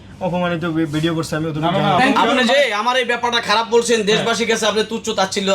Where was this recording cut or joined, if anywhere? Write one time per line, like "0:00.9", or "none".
0:02.0